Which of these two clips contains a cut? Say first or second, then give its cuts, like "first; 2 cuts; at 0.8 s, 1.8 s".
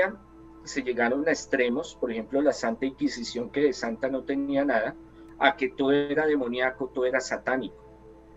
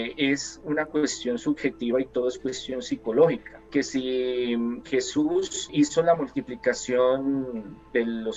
second; 2 cuts; at 3.5 s, 5.7 s